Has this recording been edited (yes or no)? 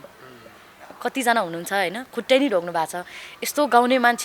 no